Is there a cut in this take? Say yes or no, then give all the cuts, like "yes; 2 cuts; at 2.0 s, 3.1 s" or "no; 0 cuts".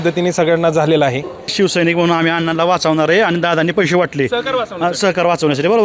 yes; 1 cut; at 1.5 s